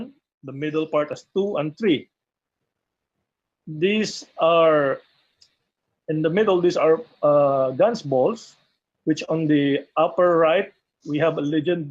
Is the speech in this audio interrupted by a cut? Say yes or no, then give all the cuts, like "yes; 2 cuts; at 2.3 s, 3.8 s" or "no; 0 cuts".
yes; 1 cut; at 4.5 s